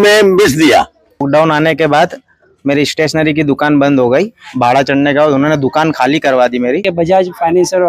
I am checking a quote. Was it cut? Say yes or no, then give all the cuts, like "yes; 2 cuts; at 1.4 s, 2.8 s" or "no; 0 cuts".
yes; 2 cuts; at 1.2 s, 6.9 s